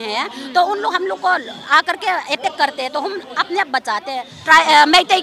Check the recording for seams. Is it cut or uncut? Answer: cut